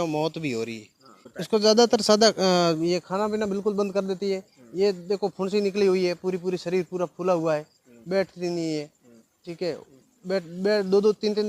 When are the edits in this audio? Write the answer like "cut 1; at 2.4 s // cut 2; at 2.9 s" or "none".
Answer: cut 1; at 1.2 s